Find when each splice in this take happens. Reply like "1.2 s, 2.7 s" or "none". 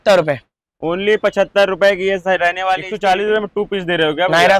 2.9 s